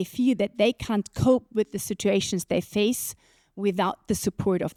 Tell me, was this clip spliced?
no; 0 cuts

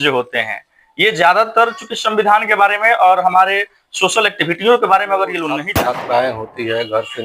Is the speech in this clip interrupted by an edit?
yes; 1 cut; at 5.7 s

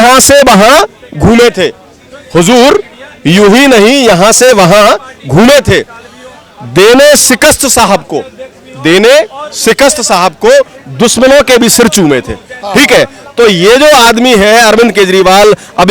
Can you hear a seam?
no; 0 cuts

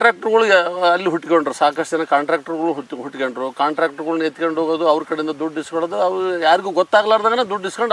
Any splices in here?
no; 0 cuts

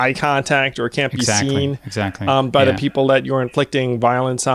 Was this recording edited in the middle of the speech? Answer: no; 0 cuts

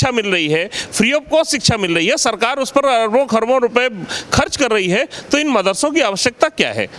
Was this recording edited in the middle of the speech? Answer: no; 0 cuts

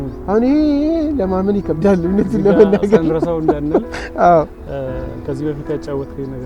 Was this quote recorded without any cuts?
yes; 0 cuts

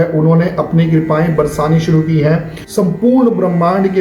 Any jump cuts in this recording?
yes; 1 cut; at 2.5 s

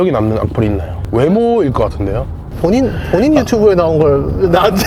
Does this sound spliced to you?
yes; 1 cut; at 2.4 s

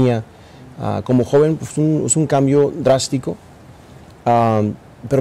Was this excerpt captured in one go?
yes; 0 cuts

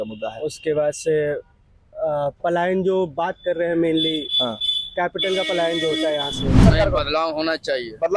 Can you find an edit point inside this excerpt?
yes; 1 cut; at 6.6 s

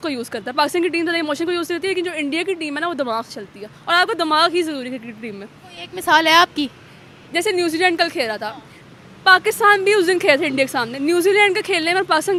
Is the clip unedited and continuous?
yes; 0 cuts

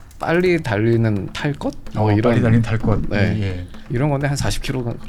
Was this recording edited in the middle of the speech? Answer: no; 0 cuts

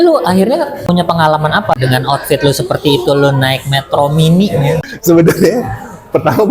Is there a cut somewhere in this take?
yes; 3 cuts; at 0.8 s, 1.8 s, 4.9 s

